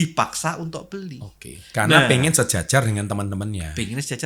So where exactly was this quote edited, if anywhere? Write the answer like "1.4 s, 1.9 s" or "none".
none